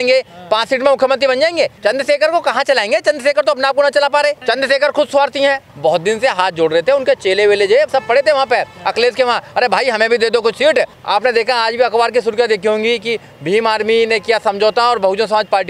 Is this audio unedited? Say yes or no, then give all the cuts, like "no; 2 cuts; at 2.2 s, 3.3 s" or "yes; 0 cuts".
no; 4 cuts; at 1.7 s, 4.4 s, 5.7 s, 11.0 s